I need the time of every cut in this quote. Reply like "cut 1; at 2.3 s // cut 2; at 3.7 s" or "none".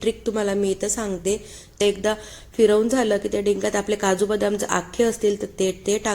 cut 1; at 1.8 s